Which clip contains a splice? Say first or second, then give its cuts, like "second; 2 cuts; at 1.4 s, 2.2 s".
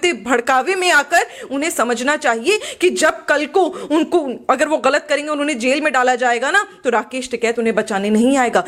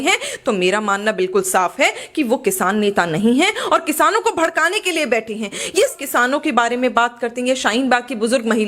second; 1 cut; at 5.9 s